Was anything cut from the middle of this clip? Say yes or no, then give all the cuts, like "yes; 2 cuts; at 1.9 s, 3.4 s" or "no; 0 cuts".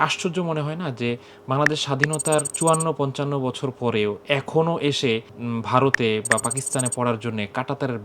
yes; 2 cuts; at 2.5 s, 5.3 s